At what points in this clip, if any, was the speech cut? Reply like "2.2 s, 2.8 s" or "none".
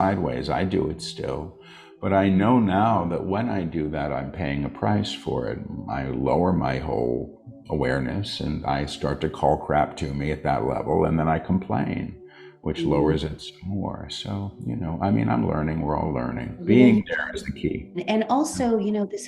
16.6 s, 18.0 s